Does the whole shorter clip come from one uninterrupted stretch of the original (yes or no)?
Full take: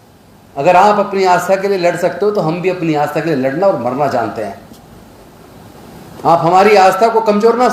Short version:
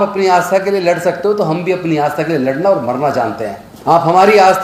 no